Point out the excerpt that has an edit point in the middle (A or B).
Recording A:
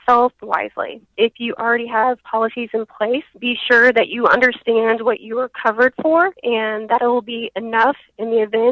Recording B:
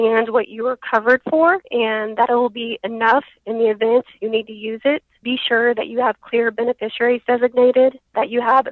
A